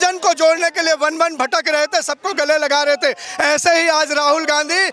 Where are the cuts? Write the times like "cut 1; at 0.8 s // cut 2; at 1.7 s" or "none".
cut 1; at 3.2 s